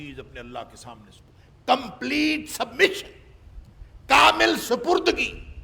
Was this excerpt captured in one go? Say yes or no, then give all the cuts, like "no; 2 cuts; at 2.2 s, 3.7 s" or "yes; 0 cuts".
yes; 0 cuts